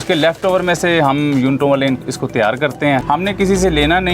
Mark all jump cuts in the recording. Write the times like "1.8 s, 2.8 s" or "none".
3.0 s